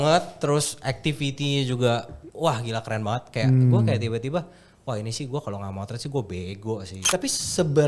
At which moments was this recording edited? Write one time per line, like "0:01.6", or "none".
0:06.9